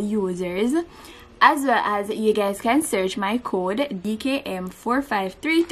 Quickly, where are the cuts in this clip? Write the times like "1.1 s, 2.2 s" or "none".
4.0 s

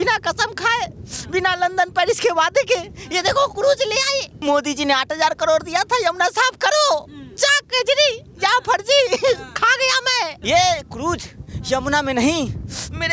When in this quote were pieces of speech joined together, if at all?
4.3 s, 10.4 s

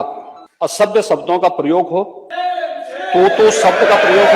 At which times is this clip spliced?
0.8 s, 2.2 s

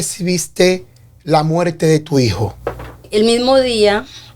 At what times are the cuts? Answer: 3.0 s

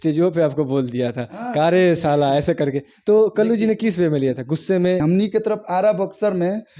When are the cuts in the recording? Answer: 5.0 s

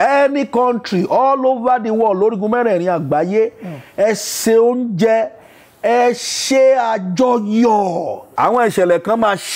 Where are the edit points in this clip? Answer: 8.2 s

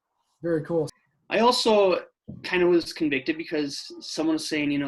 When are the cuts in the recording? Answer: 1.0 s

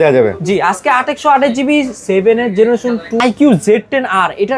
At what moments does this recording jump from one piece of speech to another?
3.2 s

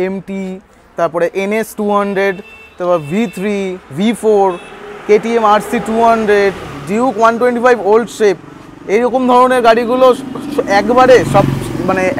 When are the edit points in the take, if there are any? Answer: none

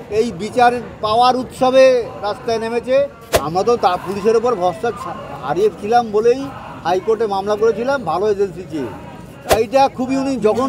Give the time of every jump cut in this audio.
3.2 s, 9.5 s

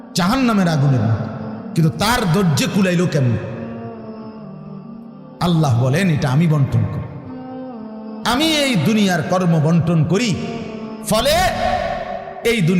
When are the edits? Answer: 3.5 s, 5.2 s

